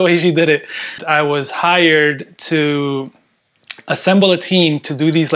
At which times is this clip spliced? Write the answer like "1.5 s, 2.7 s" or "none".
1.0 s